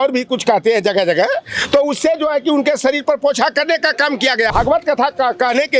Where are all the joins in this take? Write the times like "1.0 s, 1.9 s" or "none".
4.5 s